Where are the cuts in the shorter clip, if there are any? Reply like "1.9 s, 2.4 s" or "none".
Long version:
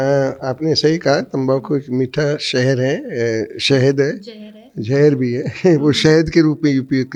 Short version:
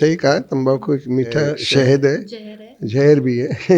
1.6 s

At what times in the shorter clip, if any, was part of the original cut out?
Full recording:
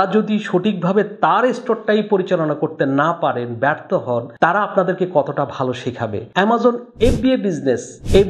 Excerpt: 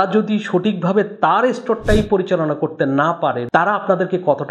3.4 s

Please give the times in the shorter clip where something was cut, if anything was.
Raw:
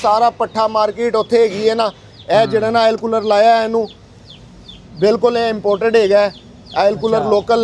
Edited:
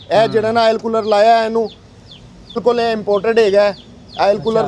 2.6 s

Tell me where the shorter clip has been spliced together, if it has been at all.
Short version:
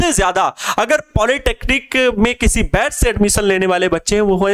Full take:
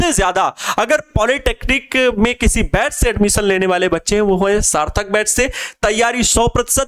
none

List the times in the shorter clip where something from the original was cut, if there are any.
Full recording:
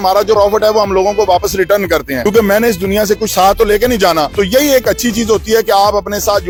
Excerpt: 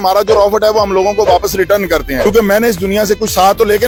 none

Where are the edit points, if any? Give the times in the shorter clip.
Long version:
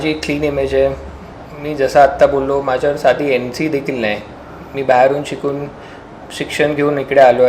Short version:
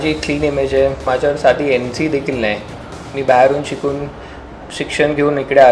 1.0 s

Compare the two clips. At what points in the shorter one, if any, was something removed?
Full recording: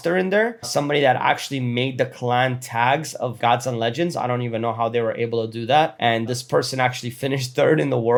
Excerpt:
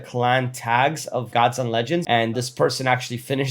2.0 s

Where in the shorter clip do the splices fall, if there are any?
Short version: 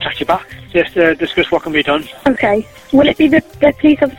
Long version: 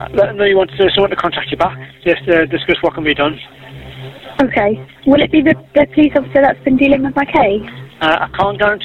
2.1 s

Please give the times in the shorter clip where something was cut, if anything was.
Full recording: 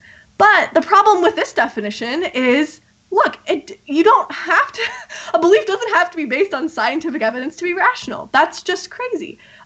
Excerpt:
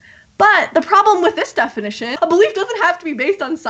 2.0 s

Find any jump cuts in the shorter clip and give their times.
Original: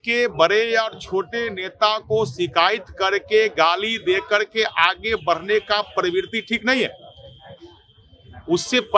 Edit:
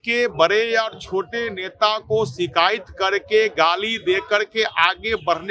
none

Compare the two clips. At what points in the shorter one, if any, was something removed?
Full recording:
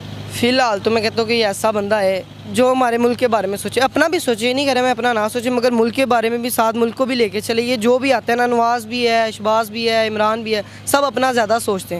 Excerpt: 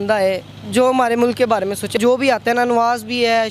2.0 s

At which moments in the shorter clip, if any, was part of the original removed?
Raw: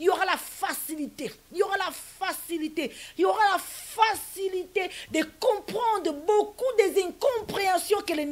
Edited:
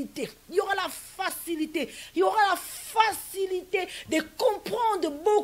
none

